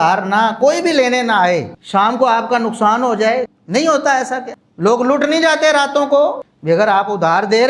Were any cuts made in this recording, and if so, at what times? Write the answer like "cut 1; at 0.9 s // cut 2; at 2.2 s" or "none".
cut 1; at 6.5 s